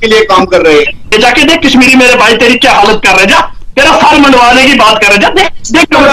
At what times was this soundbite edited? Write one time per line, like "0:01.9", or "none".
0:01.1